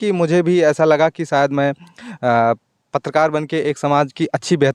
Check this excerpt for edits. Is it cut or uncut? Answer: uncut